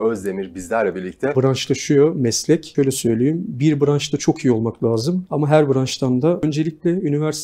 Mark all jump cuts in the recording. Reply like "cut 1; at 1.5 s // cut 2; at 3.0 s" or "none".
cut 1; at 1.3 s // cut 2; at 2.7 s // cut 3; at 5.3 s // cut 4; at 6.4 s